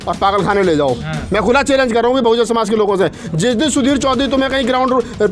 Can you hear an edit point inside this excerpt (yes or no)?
yes